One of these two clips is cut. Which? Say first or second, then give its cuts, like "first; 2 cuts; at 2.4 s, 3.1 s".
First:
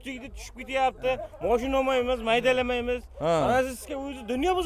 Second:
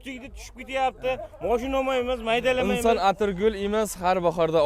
second; 1 cut; at 2.7 s